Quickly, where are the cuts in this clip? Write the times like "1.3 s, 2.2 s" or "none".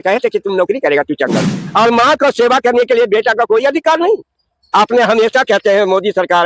1.6 s